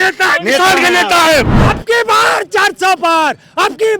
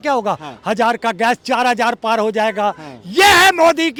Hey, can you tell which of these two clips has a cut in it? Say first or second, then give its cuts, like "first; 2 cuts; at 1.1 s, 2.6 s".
first; 1 cut; at 1.6 s